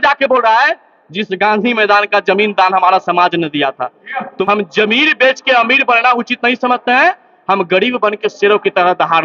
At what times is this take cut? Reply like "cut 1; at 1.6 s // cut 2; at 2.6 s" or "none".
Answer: cut 1; at 4.3 s